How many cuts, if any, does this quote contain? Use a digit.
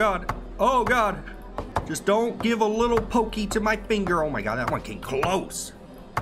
0